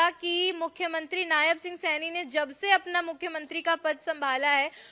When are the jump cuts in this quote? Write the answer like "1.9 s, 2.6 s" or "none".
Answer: none